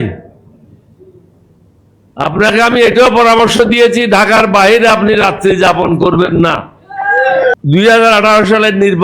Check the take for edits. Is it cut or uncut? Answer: cut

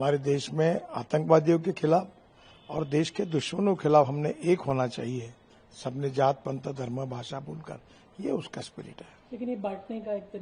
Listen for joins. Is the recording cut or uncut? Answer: uncut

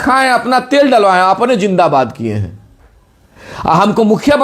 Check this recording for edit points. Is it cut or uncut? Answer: uncut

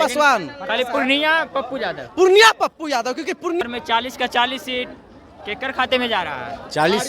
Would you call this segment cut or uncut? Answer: cut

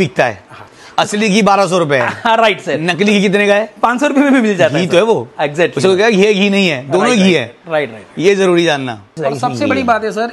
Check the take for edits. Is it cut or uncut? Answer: cut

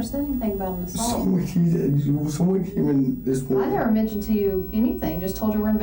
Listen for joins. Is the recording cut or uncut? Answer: uncut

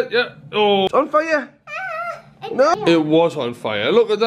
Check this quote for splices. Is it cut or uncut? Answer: cut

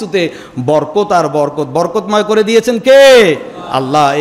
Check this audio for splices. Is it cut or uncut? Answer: uncut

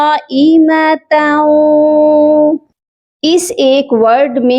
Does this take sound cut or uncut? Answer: cut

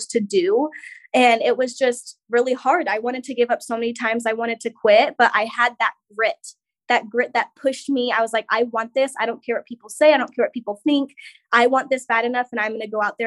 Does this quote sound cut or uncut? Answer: uncut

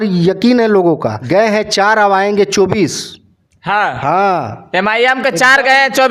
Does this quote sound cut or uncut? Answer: cut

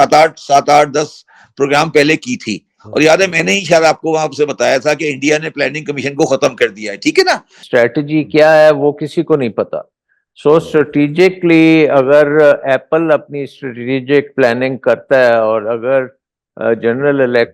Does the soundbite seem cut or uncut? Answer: cut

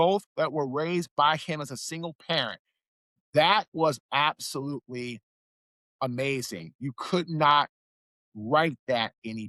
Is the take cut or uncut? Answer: uncut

